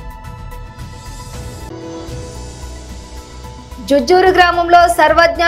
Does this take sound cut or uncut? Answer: cut